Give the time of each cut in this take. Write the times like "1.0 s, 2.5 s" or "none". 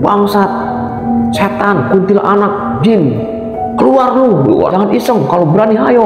4.7 s